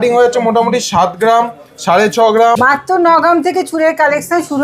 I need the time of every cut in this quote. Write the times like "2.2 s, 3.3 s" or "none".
2.6 s